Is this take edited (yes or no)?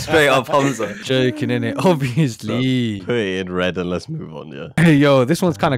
yes